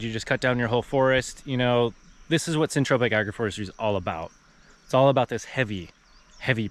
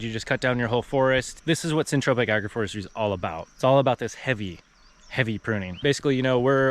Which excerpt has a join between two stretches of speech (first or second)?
second